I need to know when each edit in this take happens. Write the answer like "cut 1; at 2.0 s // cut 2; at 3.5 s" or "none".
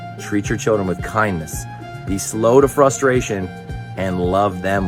cut 1; at 3.3 s